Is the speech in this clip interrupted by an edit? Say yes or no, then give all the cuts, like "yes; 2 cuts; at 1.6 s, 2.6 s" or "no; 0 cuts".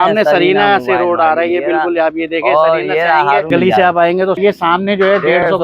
yes; 2 cuts; at 3.5 s, 4.4 s